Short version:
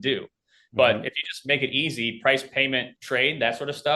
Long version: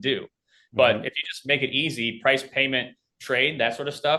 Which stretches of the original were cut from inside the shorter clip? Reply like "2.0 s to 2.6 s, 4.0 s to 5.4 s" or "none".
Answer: 2.9 s to 3.1 s